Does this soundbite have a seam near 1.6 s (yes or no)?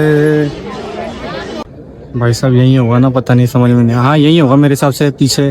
yes